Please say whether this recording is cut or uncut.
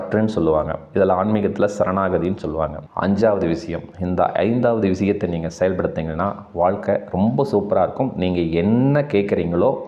cut